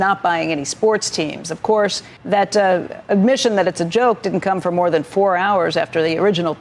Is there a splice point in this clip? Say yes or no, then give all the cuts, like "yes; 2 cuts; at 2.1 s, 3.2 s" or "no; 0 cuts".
yes; 1 cut; at 2.1 s